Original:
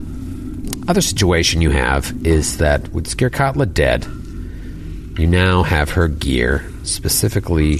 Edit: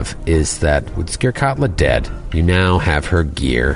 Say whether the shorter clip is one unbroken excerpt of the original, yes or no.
no